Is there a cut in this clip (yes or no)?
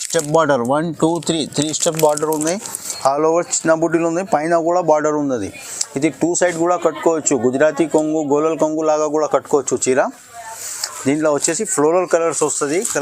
no